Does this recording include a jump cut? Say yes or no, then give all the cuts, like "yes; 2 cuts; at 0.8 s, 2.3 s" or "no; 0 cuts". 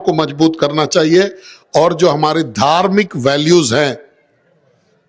no; 0 cuts